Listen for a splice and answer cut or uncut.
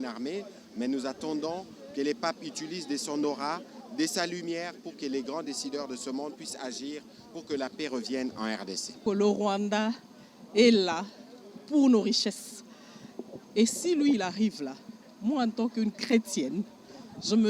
cut